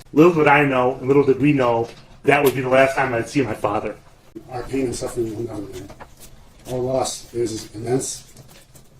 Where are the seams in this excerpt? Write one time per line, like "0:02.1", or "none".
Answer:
0:04.5